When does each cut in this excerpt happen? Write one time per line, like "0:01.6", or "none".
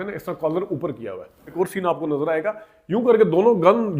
0:01.5